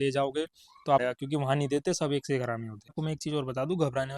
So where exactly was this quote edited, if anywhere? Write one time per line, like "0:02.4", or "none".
0:01.0
0:02.9